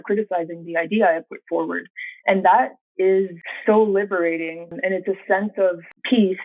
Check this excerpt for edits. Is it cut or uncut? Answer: cut